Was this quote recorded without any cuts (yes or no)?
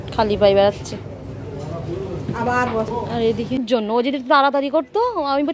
no